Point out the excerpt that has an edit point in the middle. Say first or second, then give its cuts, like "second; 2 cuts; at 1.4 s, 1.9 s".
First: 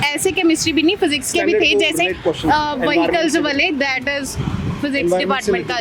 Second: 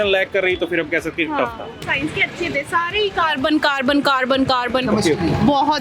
second; 1 cut; at 1.8 s